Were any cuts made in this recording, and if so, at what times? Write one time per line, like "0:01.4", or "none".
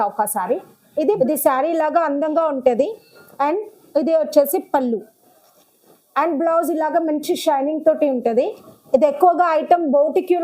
0:01.2